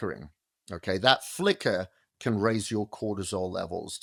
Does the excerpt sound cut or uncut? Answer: uncut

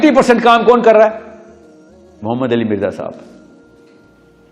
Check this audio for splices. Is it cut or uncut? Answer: cut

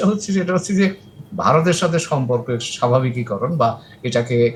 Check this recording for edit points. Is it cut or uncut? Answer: uncut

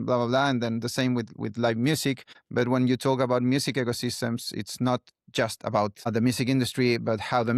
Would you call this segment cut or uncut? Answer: cut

